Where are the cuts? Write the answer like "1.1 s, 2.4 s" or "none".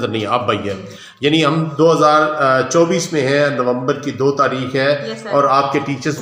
none